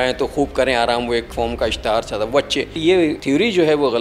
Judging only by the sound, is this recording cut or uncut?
cut